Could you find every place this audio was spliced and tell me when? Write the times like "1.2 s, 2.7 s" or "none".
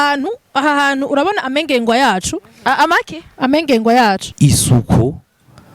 4.3 s